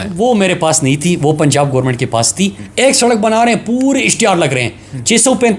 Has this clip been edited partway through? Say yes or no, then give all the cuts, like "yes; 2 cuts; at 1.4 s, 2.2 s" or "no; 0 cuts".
yes; 1 cut; at 2.6 s